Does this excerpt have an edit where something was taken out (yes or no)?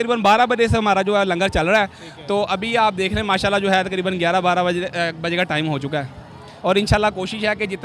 no